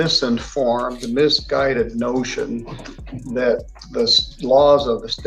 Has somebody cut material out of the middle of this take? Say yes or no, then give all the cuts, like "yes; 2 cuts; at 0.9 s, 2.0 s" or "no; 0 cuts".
no; 0 cuts